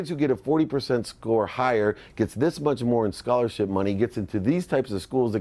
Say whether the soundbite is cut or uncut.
uncut